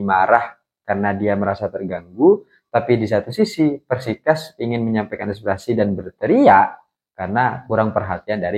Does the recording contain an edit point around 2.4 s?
no; 0 cuts

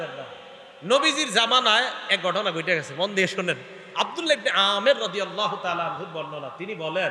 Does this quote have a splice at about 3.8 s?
no; 0 cuts

